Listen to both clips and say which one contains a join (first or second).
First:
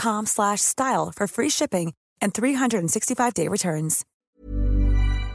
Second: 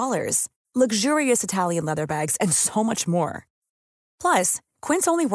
first